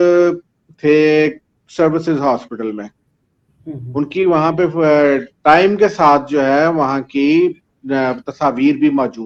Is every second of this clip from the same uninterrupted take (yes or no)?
yes